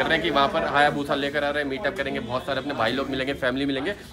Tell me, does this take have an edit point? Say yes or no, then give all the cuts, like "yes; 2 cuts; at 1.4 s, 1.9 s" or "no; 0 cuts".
no; 0 cuts